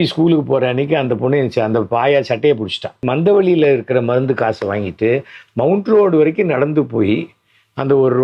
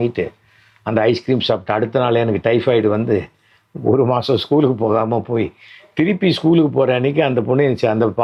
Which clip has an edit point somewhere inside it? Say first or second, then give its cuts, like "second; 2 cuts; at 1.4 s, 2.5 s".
first; 1 cut; at 3.0 s